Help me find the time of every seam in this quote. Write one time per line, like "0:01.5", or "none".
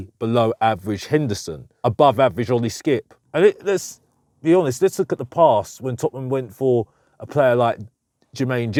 none